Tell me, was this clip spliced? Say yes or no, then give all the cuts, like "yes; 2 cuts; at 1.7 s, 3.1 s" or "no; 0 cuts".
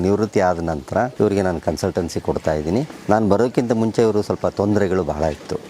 yes; 2 cuts; at 1.1 s, 2.9 s